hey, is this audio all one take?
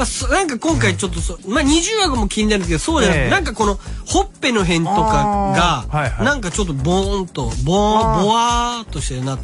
no; 1 cut; at 3.0 s

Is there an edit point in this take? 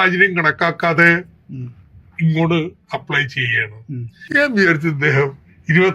yes; 1 cut; at 4.1 s

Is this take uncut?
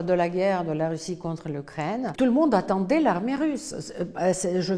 no; 1 cut; at 2.1 s

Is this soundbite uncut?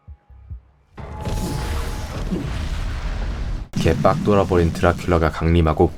no; 1 cut; at 1.0 s

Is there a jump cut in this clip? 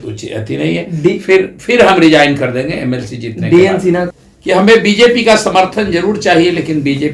yes; 1 cut; at 4.1 s

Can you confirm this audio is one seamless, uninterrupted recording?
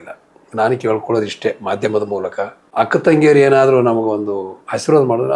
no; 1 cut; at 2.6 s

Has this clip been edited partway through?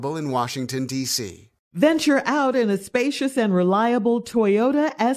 yes; 1 cut; at 1.5 s

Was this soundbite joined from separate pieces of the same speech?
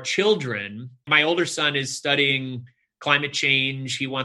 yes; 1 cut; at 1.1 s

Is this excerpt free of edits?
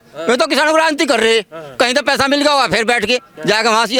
yes; 0 cuts

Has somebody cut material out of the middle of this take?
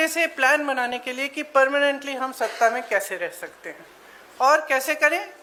no; 0 cuts

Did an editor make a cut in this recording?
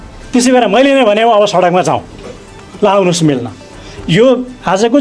no; 0 cuts

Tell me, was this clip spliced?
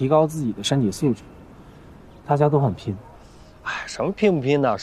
no; 0 cuts

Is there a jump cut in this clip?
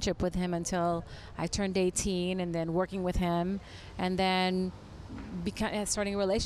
no; 0 cuts

